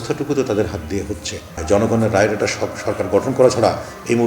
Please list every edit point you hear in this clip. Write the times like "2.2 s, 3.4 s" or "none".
1.5 s

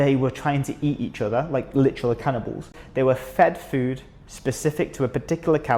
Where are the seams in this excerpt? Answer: 2.7 s

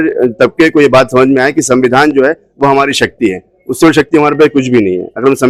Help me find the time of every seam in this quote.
none

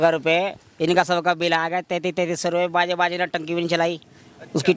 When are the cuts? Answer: none

